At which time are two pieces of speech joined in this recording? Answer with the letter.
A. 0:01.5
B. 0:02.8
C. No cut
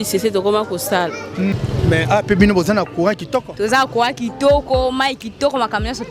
A